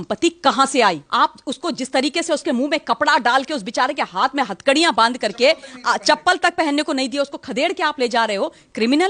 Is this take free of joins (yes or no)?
no